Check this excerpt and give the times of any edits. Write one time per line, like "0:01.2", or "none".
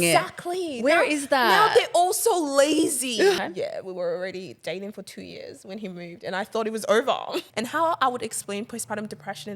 0:03.4
0:07.4